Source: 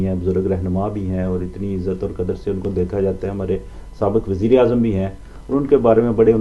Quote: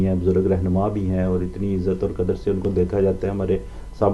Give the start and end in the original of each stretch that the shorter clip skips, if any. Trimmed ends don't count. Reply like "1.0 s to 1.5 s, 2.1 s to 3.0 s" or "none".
none